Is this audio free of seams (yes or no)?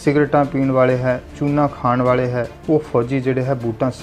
no